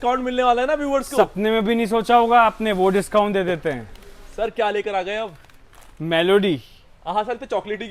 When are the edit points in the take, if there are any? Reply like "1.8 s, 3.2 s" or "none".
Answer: 4.2 s